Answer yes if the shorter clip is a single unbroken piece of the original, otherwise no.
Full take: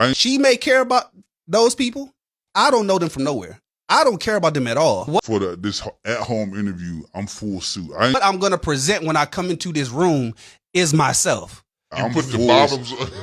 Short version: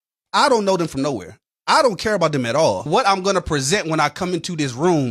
no